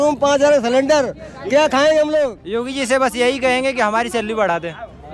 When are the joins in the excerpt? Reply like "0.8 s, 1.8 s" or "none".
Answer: 2.4 s